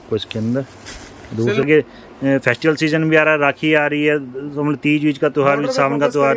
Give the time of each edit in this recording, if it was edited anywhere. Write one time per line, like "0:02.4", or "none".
0:01.6